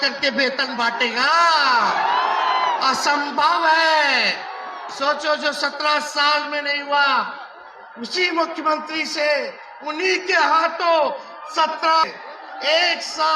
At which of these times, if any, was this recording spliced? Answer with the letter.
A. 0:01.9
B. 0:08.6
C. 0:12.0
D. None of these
C